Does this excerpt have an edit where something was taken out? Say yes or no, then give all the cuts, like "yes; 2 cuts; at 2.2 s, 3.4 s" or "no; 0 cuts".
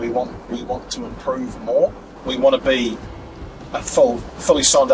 yes; 1 cut; at 2.1 s